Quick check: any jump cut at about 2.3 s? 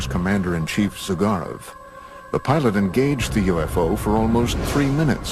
no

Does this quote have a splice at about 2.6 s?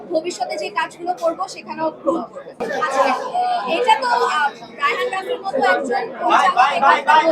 yes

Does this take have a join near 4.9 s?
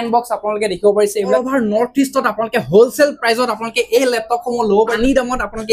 yes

